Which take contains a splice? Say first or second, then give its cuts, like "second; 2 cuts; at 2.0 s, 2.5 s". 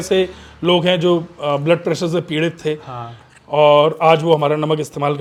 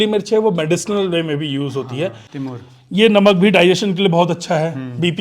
second; 1 cut; at 2.3 s